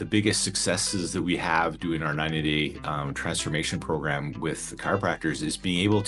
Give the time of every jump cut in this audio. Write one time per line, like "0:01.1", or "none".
none